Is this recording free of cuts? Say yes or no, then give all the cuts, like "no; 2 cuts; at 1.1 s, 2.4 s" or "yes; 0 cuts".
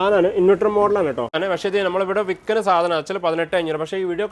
no; 1 cut; at 1.4 s